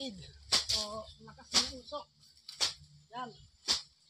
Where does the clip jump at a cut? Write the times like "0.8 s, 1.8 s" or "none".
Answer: none